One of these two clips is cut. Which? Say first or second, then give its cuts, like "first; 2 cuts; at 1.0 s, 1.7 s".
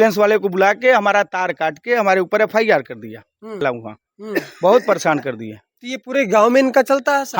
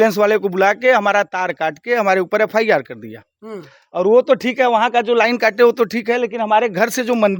first; 1 cut; at 3.6 s